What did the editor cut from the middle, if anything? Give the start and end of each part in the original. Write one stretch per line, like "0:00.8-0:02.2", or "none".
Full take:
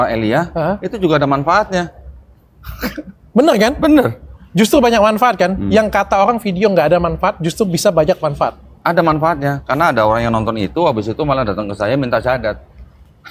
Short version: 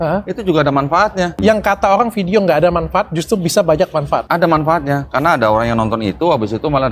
0:01.9-0:05.6
0:08.5-0:08.8

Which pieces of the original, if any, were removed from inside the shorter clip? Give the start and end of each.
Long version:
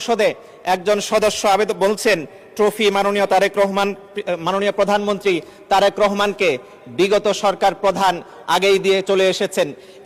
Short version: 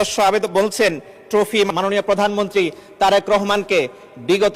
0:02.9-0:04.4

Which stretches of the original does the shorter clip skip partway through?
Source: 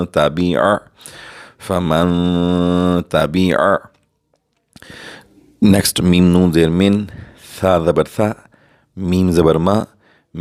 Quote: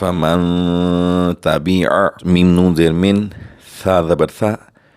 0:03.9-0:06.0

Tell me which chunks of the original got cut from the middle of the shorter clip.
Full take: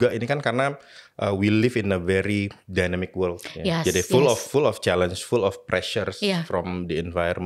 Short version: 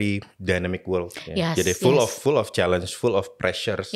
none

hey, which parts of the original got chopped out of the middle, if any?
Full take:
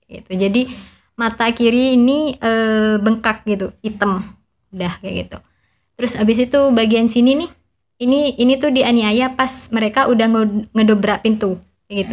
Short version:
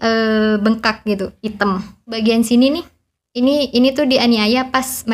0:04.6-0:06.8

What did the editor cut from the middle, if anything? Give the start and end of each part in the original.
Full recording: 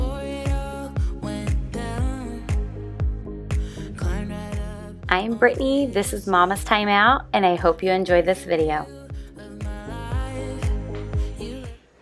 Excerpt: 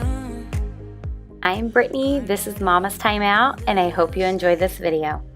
0:03.2-0:04.9

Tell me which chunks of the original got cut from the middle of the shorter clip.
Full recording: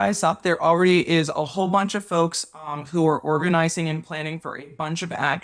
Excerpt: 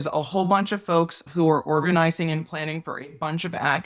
0:02.4-0:02.8

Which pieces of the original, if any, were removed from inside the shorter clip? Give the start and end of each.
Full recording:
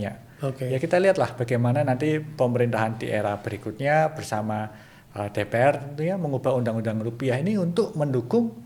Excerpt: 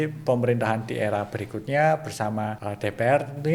0:04.7-0:05.2

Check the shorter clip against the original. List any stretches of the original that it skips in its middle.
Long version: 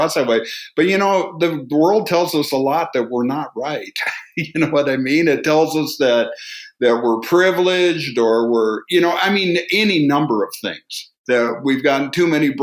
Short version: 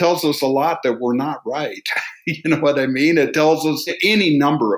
0:06.0-0:09.6

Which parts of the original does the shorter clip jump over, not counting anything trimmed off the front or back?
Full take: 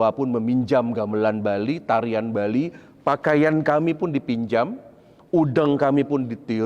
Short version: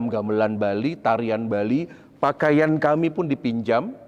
none

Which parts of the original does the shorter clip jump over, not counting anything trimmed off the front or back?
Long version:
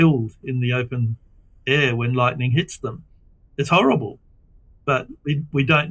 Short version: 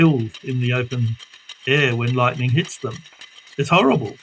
none

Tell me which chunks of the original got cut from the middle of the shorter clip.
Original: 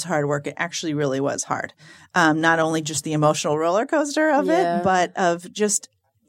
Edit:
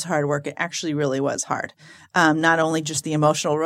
none

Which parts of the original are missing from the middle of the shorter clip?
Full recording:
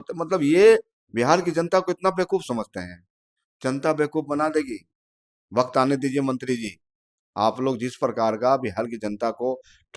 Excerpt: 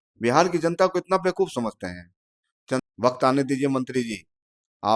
0:03.8-0:05.4

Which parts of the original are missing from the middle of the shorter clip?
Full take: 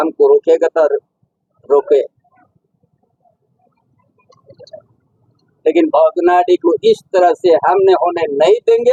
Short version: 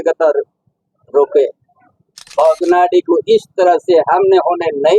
0:02.9-0:05.9

